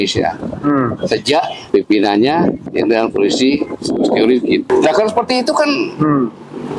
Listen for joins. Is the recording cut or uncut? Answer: cut